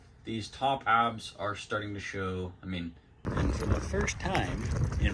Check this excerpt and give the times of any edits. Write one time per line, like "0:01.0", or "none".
0:03.3